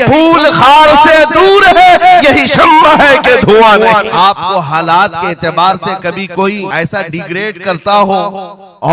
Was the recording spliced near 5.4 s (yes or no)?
no